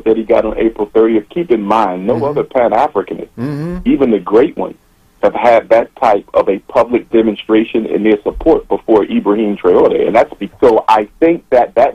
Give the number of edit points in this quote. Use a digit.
1